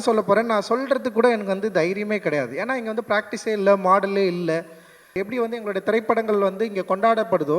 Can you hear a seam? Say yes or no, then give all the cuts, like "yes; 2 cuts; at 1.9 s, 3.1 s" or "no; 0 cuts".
yes; 1 cut; at 5.1 s